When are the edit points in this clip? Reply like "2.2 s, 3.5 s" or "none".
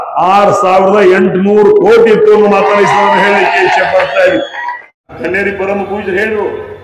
5.1 s

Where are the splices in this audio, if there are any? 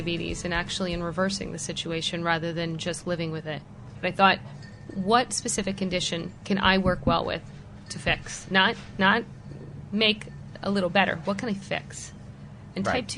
3.9 s, 4.9 s

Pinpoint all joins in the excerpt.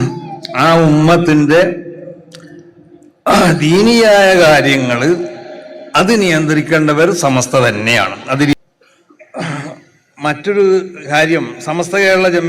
8.5 s

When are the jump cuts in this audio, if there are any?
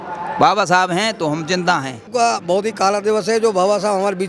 2.1 s

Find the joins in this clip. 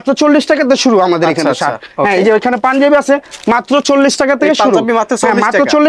none

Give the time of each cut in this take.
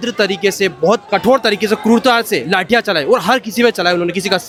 none

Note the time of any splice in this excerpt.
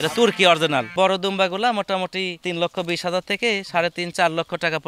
0.9 s, 2.4 s

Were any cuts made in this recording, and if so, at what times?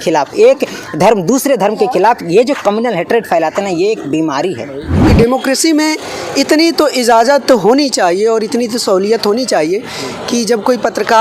5.1 s

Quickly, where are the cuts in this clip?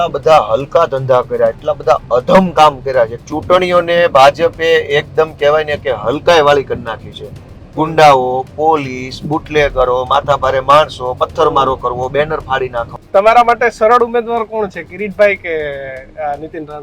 3.3 s, 12.9 s

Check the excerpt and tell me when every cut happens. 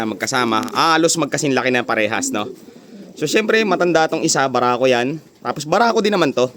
none

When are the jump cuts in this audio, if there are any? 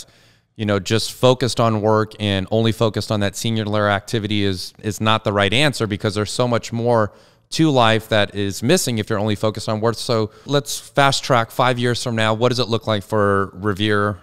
4.8 s, 10.4 s

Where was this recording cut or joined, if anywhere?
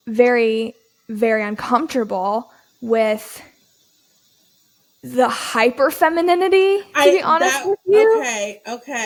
none

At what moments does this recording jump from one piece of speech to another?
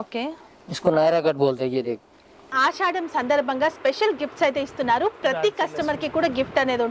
2.6 s

